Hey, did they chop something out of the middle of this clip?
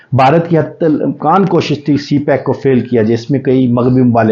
no; 0 cuts

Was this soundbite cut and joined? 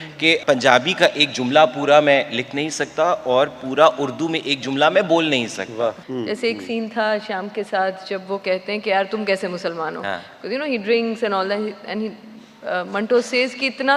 yes; 1 cut; at 6.0 s

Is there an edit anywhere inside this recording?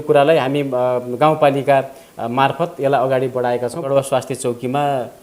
yes; 1 cut; at 3.8 s

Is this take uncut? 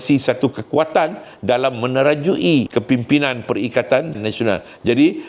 no; 1 cut; at 2.7 s

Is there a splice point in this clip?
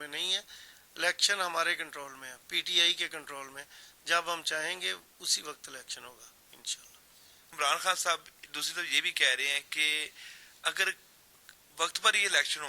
no; 0 cuts

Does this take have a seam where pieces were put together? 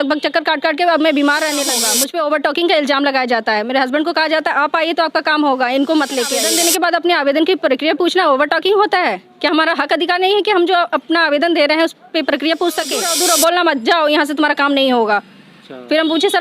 yes; 3 cuts; at 1.8 s, 6.4 s, 13.1 s

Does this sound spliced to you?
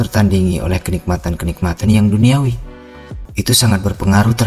yes; 1 cut; at 3.2 s

